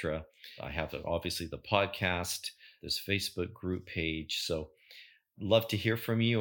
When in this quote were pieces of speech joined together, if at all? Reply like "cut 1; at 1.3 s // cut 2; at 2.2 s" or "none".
none